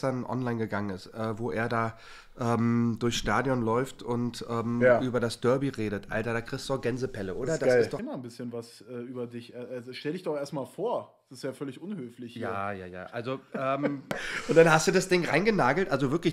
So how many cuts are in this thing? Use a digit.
2